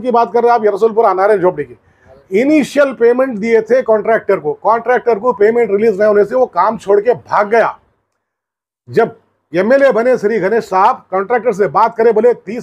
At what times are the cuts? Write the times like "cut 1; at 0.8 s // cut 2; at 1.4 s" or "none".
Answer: none